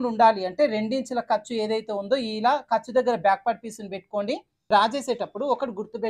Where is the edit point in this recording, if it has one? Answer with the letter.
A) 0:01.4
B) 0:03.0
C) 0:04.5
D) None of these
C